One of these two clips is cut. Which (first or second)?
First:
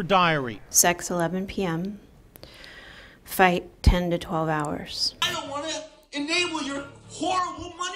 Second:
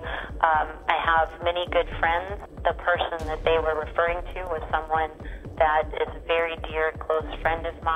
first